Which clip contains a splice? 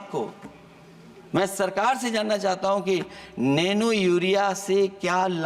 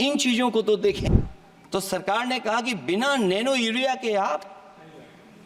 second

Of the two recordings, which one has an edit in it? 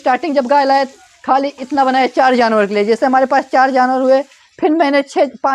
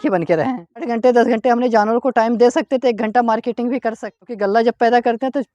second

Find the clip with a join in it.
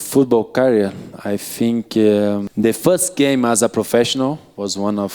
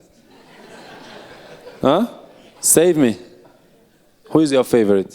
first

